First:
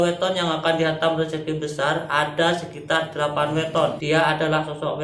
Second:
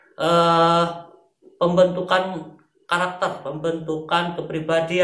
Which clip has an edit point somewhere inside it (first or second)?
first